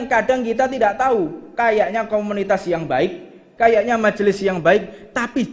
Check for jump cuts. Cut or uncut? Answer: uncut